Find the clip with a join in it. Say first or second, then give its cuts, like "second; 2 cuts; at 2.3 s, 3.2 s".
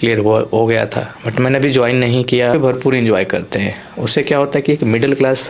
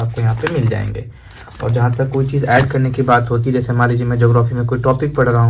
first; 1 cut; at 2.5 s